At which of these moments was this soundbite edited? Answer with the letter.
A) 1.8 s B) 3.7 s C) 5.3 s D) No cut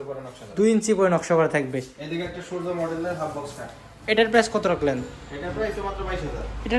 D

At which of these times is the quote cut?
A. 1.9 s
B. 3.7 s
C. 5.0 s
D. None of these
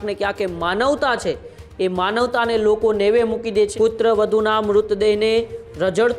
B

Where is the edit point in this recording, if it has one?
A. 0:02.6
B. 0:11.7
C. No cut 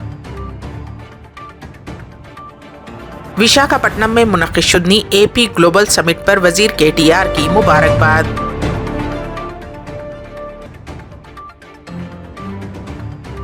C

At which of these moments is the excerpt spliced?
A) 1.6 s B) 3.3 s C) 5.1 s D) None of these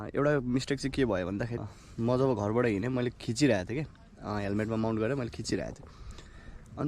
A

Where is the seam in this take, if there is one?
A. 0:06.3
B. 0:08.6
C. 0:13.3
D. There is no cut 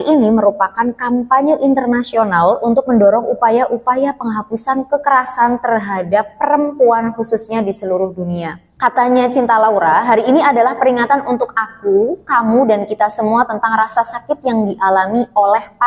B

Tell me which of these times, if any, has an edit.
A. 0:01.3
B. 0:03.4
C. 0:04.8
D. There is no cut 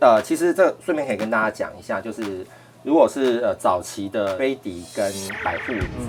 D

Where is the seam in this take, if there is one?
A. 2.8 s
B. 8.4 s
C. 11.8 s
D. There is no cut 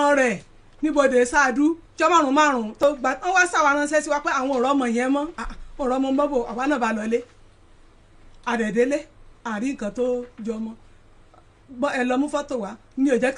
A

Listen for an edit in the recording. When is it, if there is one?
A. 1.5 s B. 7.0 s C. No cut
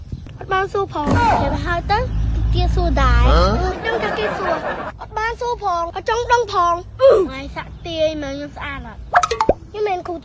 C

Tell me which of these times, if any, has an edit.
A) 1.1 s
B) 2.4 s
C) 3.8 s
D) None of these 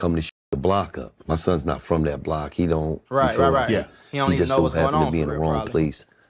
A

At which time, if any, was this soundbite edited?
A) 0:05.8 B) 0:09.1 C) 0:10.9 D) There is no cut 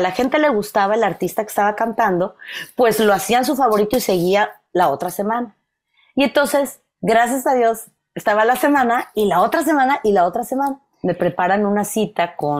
C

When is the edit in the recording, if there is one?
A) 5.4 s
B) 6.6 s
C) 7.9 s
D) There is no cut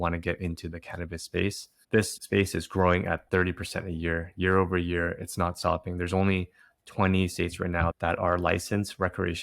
C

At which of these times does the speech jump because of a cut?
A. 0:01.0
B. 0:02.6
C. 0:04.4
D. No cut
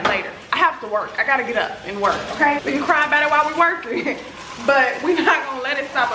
B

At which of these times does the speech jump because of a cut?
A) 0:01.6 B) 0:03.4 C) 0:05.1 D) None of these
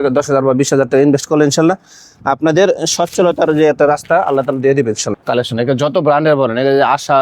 C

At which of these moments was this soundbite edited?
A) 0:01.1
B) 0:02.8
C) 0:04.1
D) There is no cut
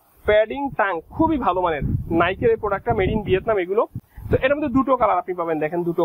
D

